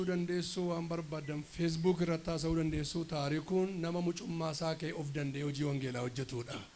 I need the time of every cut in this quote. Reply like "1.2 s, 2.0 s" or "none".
none